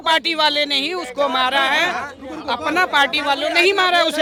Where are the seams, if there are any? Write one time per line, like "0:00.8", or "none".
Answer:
none